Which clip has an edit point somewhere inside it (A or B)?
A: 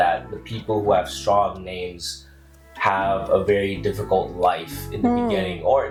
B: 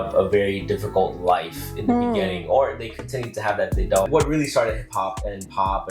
B